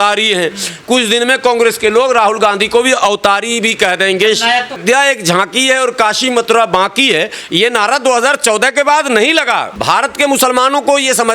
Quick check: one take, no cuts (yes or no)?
no